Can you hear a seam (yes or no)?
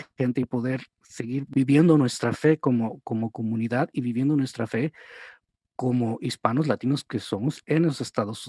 yes